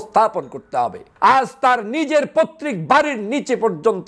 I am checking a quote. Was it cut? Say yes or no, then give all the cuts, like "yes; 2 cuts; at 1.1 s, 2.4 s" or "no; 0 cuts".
yes; 1 cut; at 1.1 s